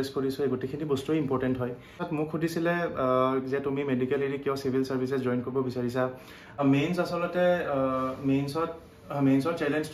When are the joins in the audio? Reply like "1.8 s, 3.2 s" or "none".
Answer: 2.0 s, 6.6 s